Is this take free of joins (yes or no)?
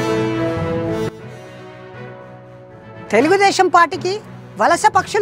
no